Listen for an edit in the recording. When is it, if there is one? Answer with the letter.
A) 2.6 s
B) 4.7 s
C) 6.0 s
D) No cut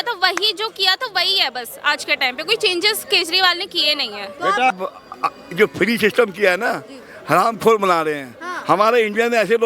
B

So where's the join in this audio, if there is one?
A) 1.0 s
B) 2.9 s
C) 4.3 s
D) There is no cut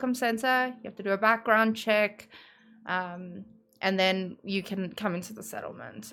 D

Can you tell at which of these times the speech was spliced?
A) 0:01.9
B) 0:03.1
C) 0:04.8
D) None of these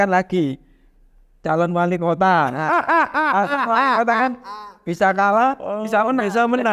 D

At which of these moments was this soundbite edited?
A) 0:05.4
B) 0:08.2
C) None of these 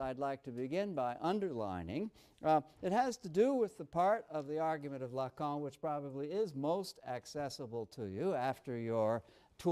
B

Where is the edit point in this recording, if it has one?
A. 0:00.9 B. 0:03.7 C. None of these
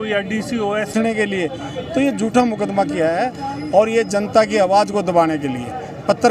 A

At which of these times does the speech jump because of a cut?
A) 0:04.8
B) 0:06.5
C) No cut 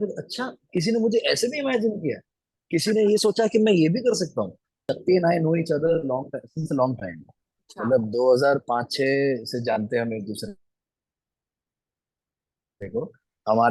A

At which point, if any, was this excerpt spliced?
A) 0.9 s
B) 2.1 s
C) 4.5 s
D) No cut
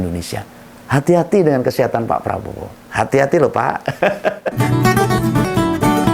C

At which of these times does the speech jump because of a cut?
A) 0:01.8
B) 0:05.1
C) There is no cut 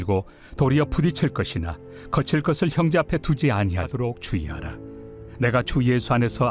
B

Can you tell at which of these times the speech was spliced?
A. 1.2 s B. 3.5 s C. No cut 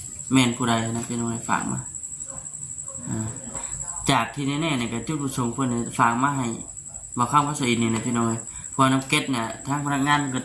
B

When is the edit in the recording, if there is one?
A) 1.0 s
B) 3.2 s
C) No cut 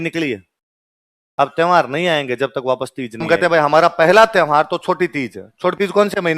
B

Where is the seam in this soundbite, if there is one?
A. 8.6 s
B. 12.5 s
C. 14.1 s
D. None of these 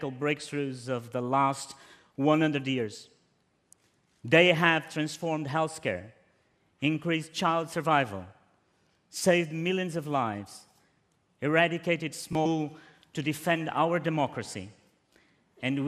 D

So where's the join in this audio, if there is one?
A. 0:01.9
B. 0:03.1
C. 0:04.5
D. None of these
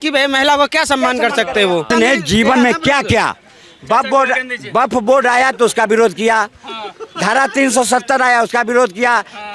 A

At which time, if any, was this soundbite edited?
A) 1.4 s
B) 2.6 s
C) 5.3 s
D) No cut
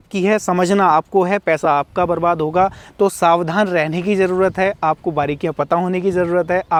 D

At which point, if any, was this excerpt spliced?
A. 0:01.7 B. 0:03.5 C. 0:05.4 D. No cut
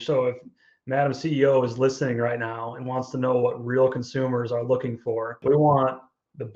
C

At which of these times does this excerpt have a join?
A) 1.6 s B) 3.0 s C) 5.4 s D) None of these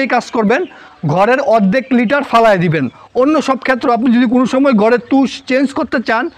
B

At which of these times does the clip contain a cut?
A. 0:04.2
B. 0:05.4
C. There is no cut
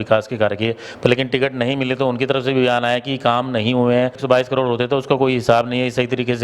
A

